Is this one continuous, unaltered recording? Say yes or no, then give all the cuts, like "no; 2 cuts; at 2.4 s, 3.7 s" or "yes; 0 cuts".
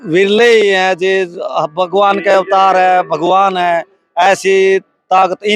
yes; 0 cuts